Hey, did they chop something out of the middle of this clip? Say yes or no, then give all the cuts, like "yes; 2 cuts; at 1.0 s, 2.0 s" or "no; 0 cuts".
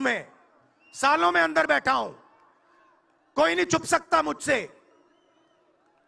no; 0 cuts